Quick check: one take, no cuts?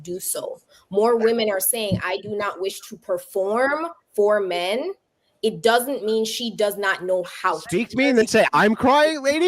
no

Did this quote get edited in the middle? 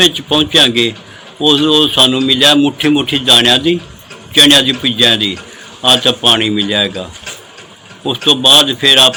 no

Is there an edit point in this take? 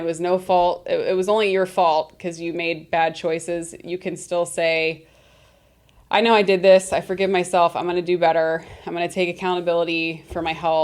no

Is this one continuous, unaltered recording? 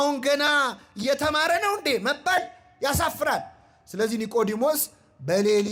yes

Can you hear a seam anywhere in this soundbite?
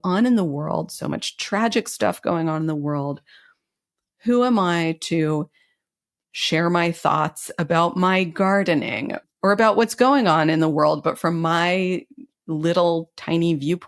yes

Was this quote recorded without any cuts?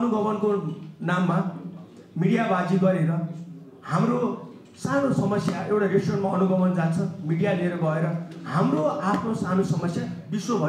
yes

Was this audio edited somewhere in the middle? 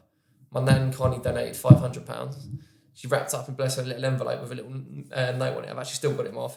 no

